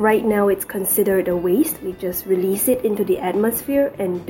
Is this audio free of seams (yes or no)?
yes